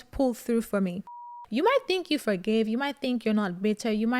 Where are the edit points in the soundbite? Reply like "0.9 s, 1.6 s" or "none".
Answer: 1.4 s